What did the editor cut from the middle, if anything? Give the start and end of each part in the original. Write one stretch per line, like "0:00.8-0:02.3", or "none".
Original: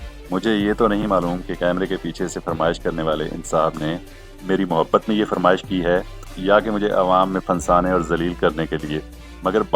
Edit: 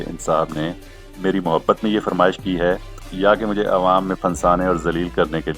none